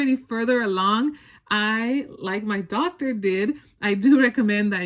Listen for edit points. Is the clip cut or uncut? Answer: uncut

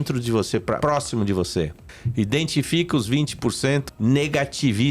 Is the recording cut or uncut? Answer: cut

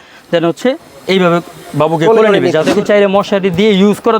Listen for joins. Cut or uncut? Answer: cut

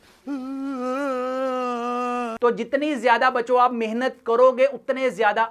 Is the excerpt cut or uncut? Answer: uncut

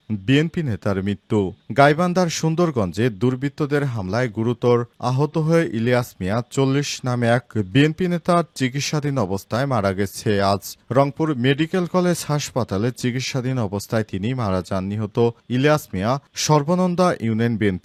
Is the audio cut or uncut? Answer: uncut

